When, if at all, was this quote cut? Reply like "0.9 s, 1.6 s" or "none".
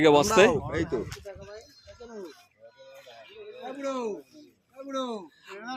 1.1 s